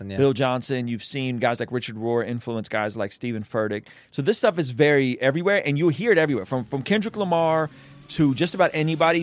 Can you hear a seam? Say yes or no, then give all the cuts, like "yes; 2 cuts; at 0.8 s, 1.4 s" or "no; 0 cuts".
no; 0 cuts